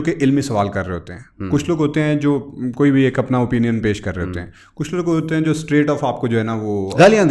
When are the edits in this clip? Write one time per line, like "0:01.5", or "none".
none